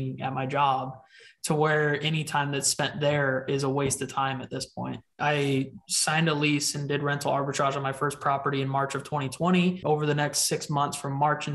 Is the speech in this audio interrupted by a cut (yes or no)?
yes